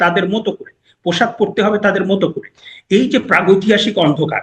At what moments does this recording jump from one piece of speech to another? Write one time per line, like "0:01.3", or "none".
none